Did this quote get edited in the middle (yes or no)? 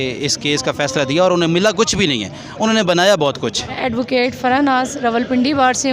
yes